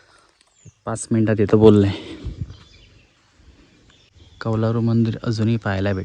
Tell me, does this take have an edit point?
yes; 1 cut; at 4.1 s

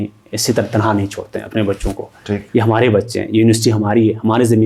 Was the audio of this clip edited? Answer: no; 0 cuts

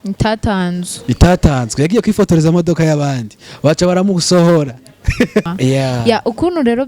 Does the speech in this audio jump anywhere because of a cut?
yes; 1 cut; at 5.5 s

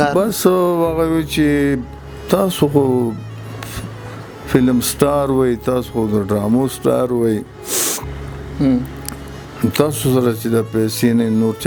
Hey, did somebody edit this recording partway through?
no; 0 cuts

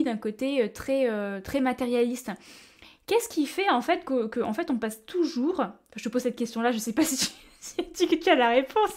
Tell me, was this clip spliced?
no; 0 cuts

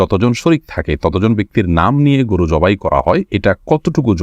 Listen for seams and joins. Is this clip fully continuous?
no; 1 cut; at 3.3 s

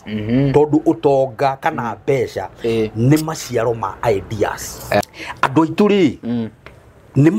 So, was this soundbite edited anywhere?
yes; 1 cut; at 5.0 s

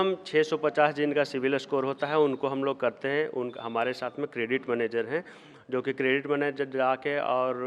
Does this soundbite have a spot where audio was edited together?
no; 0 cuts

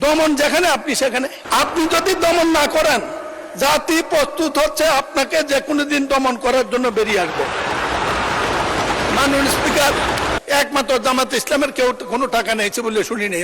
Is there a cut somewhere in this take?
yes; 2 cuts; at 1.4 s, 10.4 s

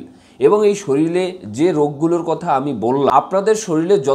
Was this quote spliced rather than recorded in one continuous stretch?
yes; 1 cut; at 3.1 s

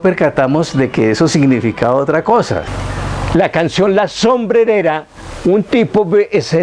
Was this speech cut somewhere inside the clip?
yes; 1 cut; at 2.7 s

